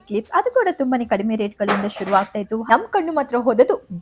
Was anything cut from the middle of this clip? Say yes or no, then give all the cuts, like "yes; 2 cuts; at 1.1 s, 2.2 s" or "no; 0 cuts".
yes; 1 cut; at 2.7 s